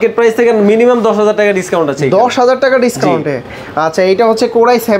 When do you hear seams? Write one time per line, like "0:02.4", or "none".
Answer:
none